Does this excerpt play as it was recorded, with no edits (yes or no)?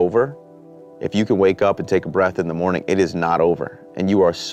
yes